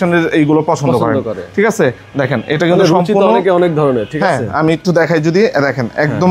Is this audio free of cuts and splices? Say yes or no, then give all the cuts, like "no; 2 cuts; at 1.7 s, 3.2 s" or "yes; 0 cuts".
yes; 0 cuts